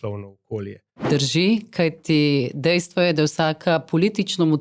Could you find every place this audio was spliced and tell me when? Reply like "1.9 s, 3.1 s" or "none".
1.1 s